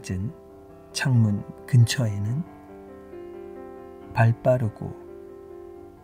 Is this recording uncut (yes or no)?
no